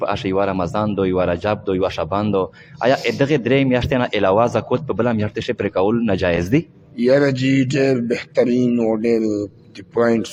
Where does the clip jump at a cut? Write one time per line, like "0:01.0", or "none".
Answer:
none